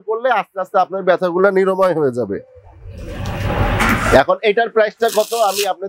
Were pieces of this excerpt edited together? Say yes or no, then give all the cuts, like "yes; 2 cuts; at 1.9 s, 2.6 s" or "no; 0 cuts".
no; 0 cuts